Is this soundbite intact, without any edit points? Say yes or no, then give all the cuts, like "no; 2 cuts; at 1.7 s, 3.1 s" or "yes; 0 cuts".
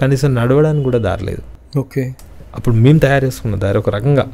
yes; 0 cuts